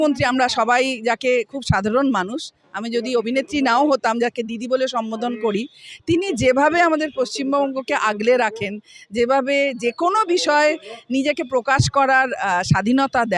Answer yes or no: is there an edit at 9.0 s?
no